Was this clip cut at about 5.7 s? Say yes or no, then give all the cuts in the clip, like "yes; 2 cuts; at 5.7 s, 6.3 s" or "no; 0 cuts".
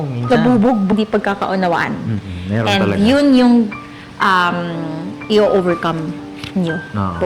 no; 1 cut; at 0.9 s